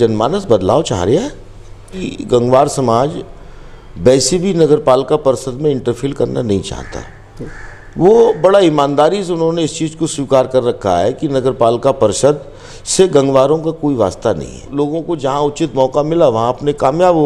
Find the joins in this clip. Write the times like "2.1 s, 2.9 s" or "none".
2.1 s, 14.7 s